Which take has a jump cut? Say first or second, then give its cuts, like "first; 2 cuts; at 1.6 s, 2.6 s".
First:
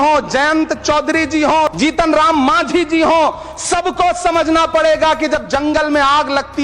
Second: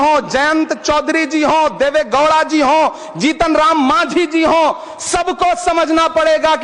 first; 1 cut; at 1.7 s